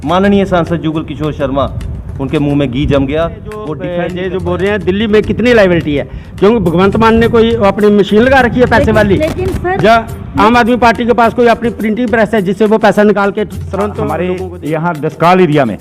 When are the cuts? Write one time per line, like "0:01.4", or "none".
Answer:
0:03.7
0:14.1